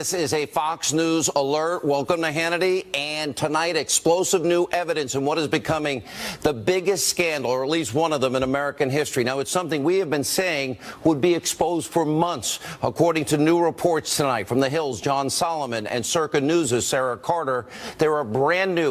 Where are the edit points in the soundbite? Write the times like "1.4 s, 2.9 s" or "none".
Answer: none